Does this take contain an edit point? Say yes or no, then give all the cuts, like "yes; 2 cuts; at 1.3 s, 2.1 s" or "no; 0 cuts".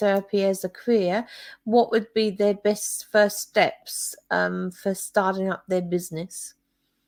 no; 0 cuts